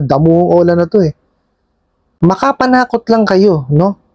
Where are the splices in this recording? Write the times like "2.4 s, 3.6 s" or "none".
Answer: 2.1 s